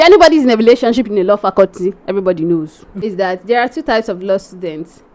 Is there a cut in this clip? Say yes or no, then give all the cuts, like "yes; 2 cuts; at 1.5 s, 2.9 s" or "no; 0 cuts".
yes; 1 cut; at 3.0 s